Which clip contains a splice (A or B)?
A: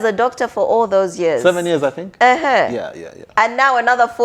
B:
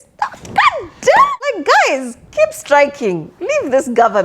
B